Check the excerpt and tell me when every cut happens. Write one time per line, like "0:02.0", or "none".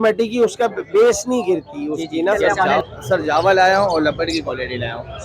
0:02.4